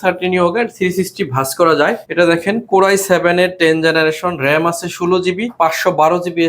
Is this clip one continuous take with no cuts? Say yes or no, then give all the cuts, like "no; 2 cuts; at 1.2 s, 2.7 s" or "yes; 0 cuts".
no; 2 cuts; at 2.0 s, 5.5 s